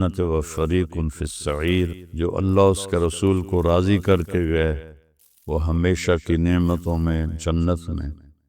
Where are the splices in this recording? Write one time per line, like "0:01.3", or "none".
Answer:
0:02.0